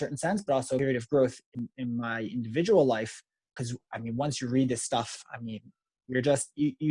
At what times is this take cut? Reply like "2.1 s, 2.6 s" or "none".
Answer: 0.8 s, 1.4 s, 3.5 s